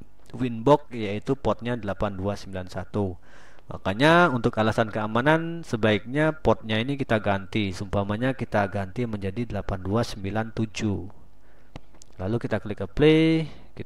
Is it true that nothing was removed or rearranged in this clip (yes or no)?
yes